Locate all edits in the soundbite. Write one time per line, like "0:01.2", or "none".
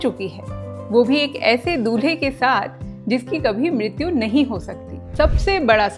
0:05.0